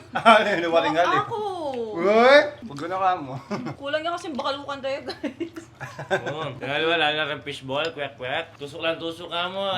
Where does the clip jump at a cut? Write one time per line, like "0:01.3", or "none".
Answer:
0:02.7
0:03.8
0:06.6
0:08.6